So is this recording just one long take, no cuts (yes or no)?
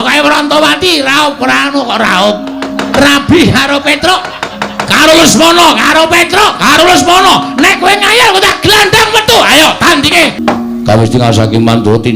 no